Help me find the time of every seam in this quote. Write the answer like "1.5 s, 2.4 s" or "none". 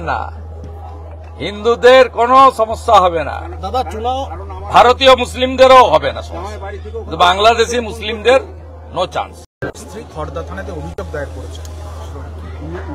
9.4 s

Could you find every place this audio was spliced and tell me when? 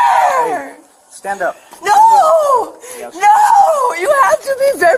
none

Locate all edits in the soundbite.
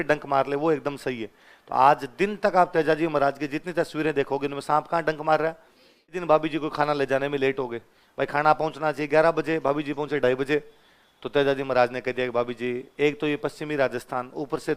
6.2 s

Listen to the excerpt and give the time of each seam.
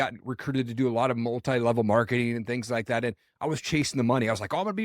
none

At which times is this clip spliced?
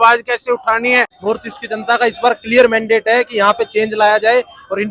1.1 s

